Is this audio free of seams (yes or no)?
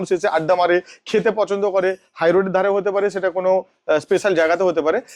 yes